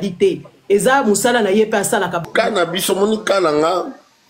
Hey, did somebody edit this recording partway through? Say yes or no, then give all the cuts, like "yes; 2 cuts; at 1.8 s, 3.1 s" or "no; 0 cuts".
yes; 1 cut; at 2.3 s